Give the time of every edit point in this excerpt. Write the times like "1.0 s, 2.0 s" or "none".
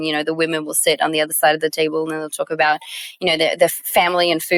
none